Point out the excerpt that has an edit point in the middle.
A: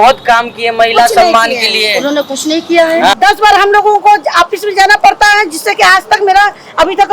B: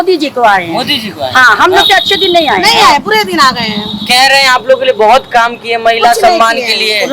A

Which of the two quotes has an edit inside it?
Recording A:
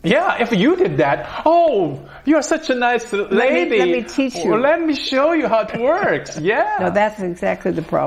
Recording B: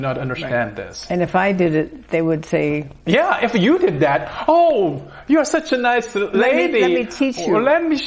A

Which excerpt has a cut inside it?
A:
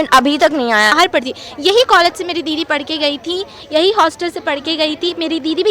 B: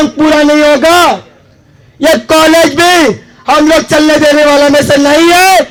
A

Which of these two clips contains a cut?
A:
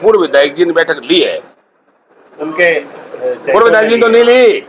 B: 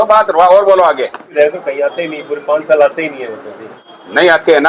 B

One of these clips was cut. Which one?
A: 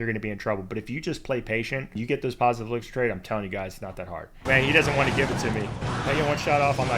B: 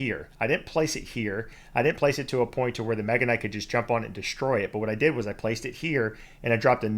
A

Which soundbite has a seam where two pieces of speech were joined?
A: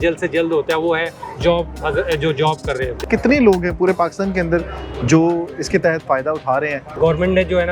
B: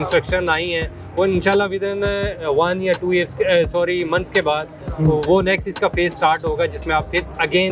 A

